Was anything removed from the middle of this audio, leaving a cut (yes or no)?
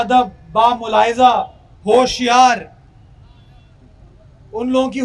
no